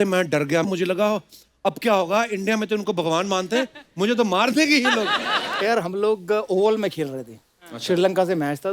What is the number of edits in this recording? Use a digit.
1